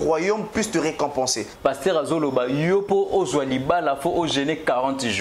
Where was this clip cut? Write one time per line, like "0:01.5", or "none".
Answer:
0:01.5